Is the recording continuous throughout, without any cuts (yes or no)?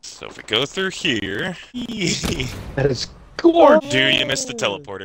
no